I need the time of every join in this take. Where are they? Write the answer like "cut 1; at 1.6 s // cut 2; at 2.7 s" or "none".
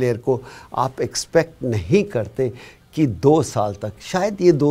none